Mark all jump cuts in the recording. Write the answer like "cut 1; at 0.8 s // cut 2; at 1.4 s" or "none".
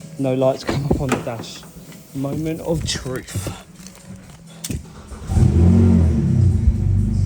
cut 1; at 4.9 s